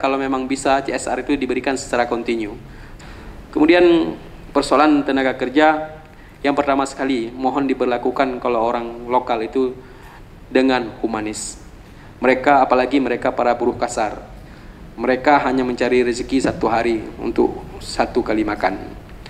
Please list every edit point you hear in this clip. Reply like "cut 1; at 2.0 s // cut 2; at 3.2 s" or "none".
cut 1; at 2.8 s